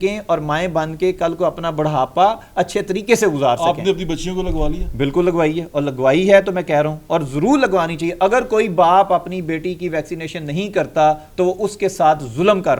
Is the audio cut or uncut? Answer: uncut